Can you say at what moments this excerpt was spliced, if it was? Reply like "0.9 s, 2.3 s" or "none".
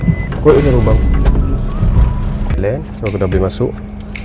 2.6 s